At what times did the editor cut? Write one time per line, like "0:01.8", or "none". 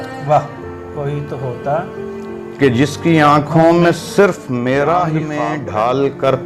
0:05.3